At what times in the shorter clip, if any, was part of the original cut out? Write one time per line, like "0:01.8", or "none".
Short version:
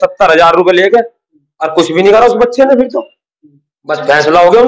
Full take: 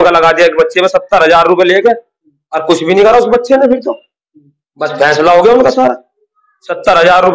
none